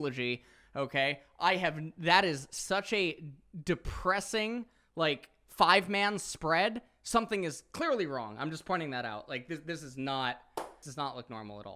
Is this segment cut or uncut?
cut